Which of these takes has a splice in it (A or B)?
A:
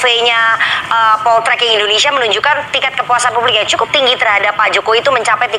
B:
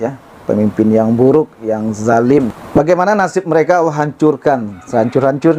B